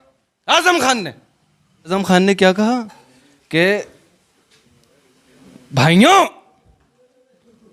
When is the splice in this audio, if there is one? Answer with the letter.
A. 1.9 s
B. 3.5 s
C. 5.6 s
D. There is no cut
A